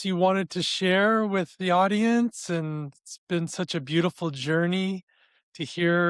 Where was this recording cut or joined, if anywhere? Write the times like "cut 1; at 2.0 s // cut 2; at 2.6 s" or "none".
none